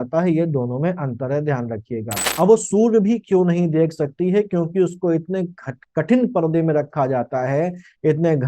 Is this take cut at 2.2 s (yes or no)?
yes